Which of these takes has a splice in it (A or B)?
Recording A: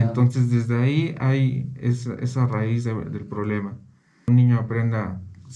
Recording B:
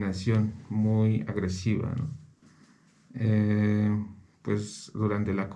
A